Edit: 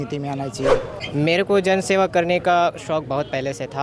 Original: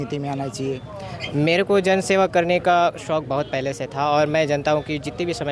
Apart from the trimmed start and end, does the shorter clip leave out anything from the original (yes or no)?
yes